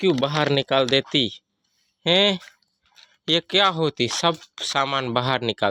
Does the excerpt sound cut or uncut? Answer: uncut